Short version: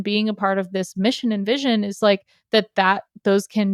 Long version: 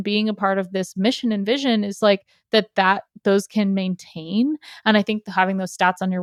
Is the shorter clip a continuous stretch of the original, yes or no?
yes